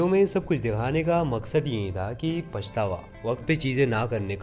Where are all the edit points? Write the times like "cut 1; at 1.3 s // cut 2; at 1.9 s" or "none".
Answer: none